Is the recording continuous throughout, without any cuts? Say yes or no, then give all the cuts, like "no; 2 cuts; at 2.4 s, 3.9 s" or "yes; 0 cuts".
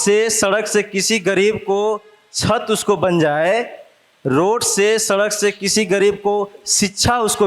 yes; 0 cuts